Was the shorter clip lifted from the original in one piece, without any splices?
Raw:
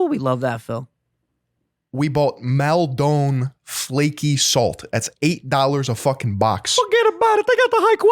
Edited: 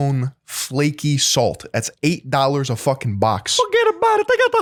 yes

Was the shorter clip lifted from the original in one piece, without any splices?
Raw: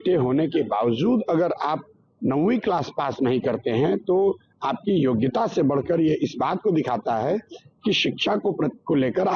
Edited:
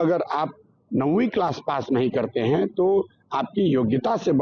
yes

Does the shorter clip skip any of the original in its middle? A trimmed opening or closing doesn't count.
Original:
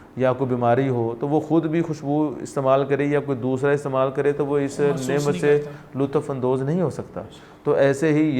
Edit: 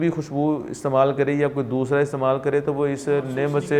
no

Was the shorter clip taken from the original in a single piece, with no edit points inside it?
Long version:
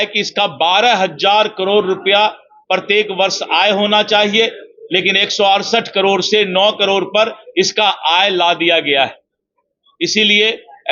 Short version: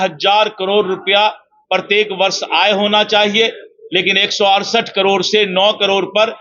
yes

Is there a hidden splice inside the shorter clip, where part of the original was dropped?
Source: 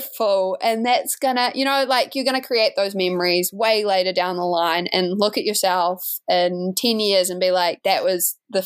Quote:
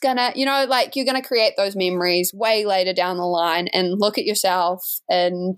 no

